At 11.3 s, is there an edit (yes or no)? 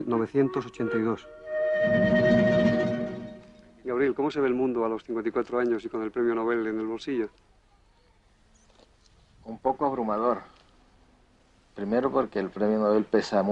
no